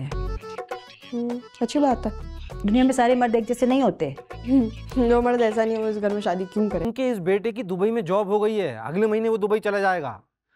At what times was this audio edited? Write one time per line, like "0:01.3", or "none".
0:06.8